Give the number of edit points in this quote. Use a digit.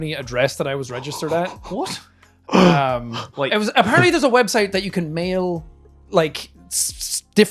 0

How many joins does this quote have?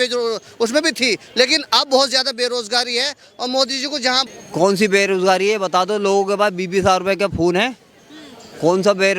1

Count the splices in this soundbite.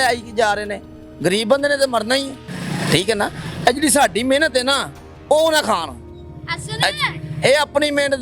0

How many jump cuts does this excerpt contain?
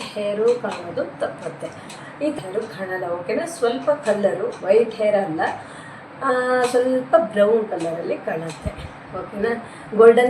1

